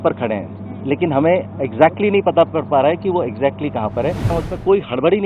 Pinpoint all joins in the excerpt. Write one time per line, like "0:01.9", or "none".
0:04.3